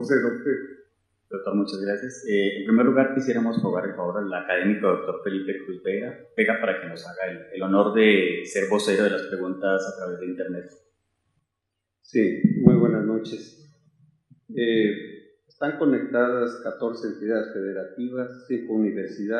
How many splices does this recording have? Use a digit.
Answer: 1